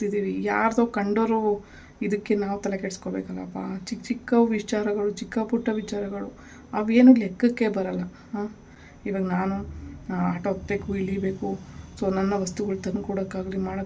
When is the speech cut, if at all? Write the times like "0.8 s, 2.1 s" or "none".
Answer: none